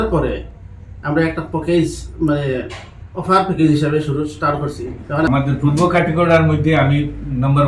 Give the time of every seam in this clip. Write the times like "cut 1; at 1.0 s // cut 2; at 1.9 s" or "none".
cut 1; at 5.3 s